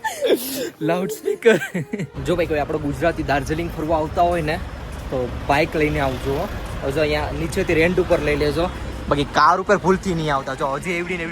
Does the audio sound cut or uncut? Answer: cut